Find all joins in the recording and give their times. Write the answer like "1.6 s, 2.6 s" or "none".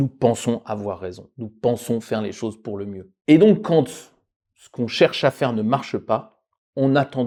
none